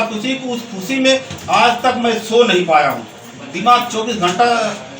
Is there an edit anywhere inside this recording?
no; 0 cuts

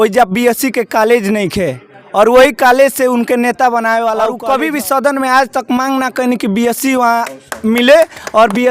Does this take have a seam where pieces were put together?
yes; 1 cut; at 4.4 s

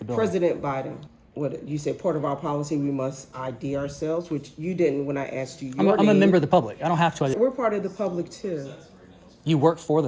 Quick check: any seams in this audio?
yes; 2 cuts; at 1.0 s, 7.3 s

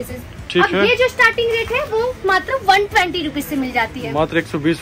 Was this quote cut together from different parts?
no; 0 cuts

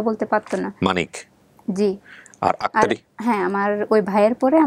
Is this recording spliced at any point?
no; 0 cuts

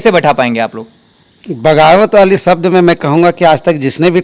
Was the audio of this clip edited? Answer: no; 0 cuts

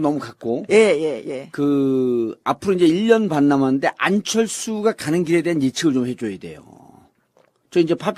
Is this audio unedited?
yes; 0 cuts

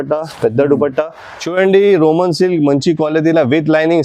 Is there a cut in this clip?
yes; 1 cut; at 1.3 s

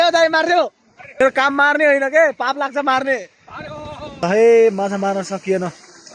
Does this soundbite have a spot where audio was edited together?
yes; 1 cut; at 4.2 s

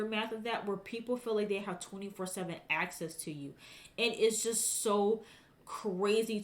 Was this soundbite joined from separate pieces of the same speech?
no; 0 cuts

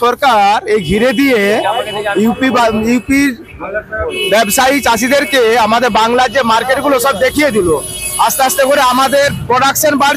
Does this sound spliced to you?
no; 0 cuts

